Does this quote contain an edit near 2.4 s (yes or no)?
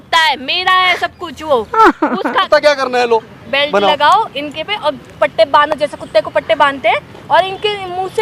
yes